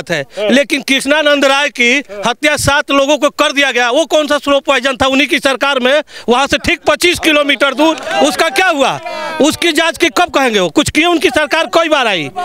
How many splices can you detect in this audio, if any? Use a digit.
0